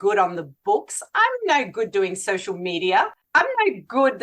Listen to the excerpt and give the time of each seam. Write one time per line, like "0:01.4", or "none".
0:03.2